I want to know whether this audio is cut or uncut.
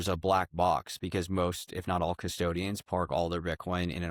uncut